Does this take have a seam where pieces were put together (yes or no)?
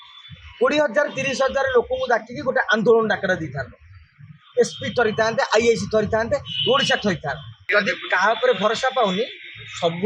yes